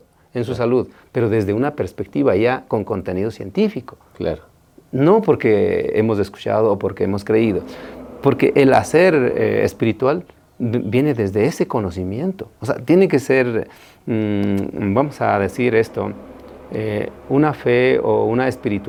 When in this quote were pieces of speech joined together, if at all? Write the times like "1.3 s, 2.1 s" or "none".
none